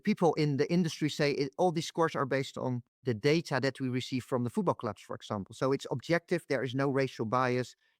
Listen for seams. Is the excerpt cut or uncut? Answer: cut